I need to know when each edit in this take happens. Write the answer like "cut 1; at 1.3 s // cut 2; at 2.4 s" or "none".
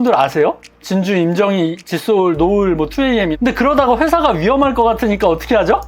cut 1; at 3.3 s

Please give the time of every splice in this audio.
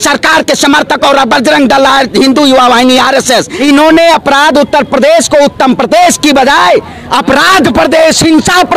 cut 1; at 3.5 s

